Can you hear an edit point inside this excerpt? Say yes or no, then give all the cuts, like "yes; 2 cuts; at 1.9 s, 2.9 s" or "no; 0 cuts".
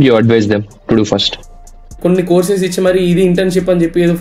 yes; 1 cut; at 1.5 s